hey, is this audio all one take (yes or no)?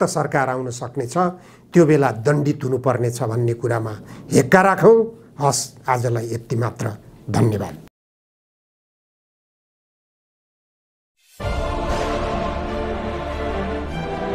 yes